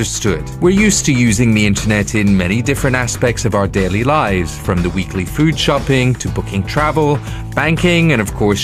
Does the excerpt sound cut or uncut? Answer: uncut